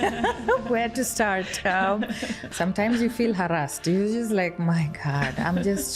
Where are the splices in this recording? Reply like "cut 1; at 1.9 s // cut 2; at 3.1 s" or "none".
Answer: cut 1; at 2.4 s